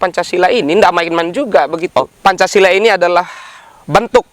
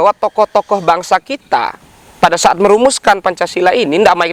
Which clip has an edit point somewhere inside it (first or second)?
first